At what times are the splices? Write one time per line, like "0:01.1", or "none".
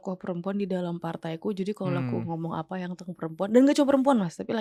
none